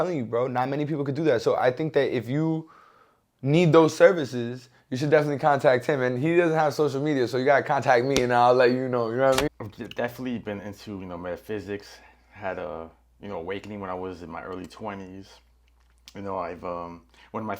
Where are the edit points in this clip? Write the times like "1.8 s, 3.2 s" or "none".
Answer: 9.5 s